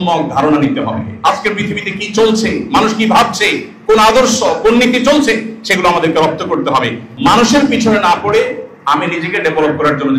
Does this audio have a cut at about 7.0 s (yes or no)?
yes